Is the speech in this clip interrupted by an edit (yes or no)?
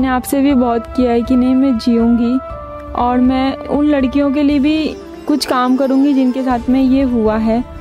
no